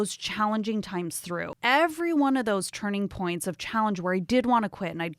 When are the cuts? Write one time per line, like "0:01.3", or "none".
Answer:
0:01.5